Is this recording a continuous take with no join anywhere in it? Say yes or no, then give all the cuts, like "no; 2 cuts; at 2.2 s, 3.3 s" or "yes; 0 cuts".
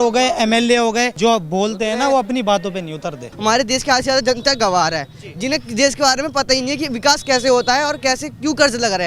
no; 2 cuts; at 1.1 s, 3.3 s